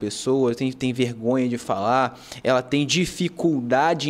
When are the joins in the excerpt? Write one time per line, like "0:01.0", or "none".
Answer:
none